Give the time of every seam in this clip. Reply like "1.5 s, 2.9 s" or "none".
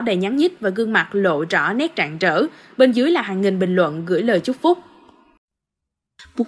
5.5 s